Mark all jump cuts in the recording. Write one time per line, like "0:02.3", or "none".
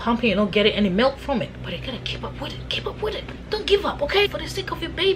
0:01.6
0:04.3